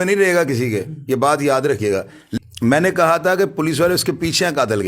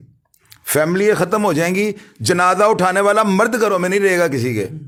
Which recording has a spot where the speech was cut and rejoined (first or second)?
first